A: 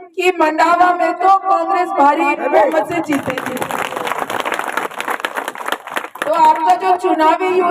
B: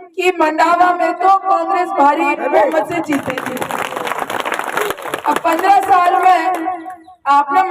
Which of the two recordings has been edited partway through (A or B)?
B